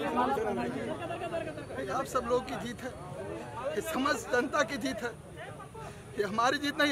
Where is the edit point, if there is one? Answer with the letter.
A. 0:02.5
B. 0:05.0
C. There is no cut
C